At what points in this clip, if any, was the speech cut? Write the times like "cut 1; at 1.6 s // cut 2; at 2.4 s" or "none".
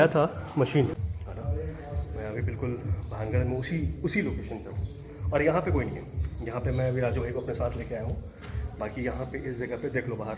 cut 1; at 0.9 s

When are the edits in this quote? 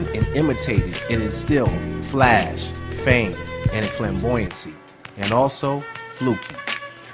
cut 1; at 3.1 s

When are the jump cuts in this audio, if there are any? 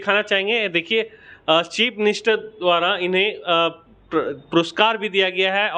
none

